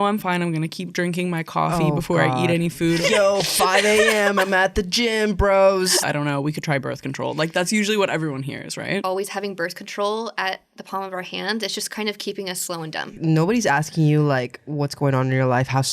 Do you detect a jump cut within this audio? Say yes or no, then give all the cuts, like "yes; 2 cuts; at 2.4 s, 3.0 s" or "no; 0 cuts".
yes; 4 cuts; at 3.0 s, 6.0 s, 9.0 s, 13.2 s